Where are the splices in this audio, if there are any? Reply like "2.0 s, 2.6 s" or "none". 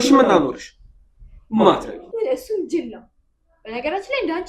2.0 s